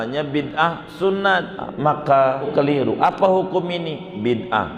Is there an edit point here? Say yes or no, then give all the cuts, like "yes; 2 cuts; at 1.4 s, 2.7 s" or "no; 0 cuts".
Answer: yes; 2 cuts; at 1.7 s, 2.5 s